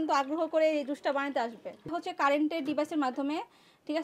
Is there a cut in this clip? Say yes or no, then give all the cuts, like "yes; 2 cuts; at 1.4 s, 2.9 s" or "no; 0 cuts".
yes; 1 cut; at 1.9 s